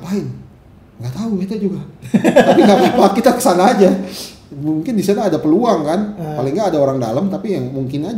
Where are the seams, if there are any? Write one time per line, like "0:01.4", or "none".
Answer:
none